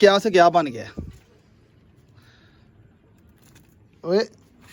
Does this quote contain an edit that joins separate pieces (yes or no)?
no